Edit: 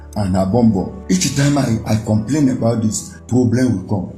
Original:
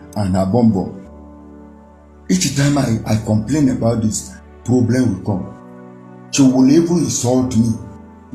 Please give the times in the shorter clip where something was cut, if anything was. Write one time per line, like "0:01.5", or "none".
0:01.0
0:03.1